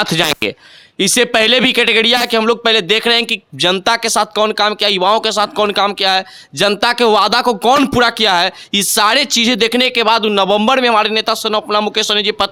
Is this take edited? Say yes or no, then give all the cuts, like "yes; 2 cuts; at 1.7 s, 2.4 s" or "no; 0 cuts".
no; 0 cuts